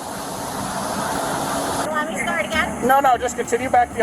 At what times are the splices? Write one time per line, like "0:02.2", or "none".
0:01.8